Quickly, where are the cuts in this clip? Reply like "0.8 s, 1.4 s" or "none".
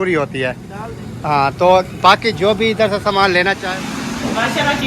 3.6 s